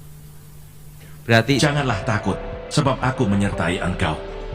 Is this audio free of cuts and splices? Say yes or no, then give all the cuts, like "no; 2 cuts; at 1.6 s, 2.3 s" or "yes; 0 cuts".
no; 1 cut; at 1.6 s